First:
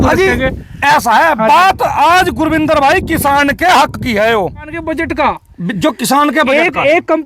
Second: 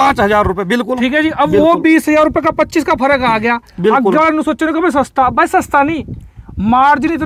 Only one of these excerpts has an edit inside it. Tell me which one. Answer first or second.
first